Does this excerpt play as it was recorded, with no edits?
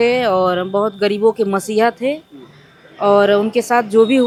yes; 0 cuts

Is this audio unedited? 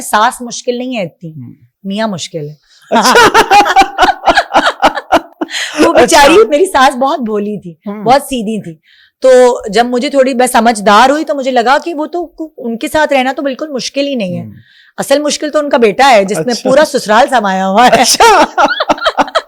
yes; 0 cuts

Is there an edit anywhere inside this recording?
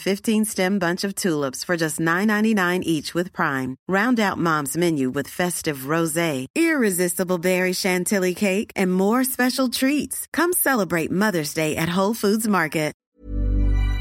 yes; 1 cut; at 13.1 s

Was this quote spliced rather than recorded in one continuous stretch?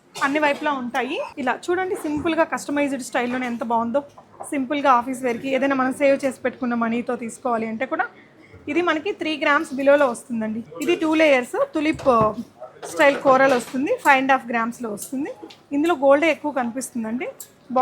yes; 2 cuts; at 1.3 s, 10.7 s

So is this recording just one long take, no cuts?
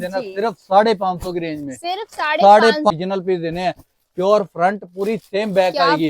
no; 1 cut; at 2.9 s

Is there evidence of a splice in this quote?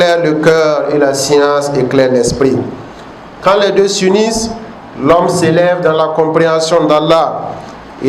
no; 0 cuts

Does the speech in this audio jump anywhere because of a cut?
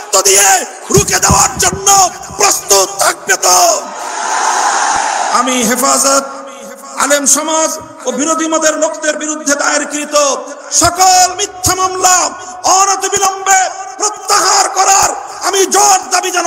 yes; 1 cut; at 5.0 s

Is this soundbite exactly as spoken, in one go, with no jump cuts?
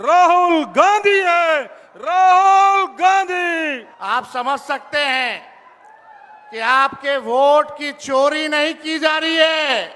no; 1 cut; at 3.9 s

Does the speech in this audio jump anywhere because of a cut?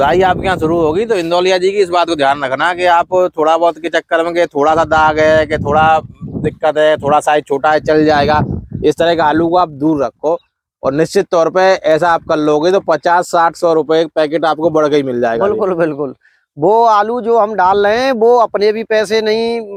no; 0 cuts

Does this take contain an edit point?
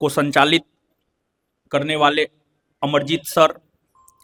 no; 0 cuts

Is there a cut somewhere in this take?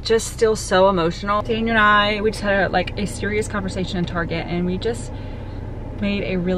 yes; 1 cut; at 1.4 s

